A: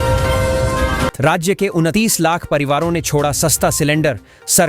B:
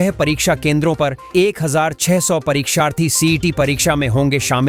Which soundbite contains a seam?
A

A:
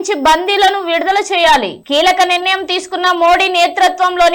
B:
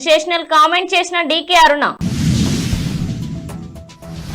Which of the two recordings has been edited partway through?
B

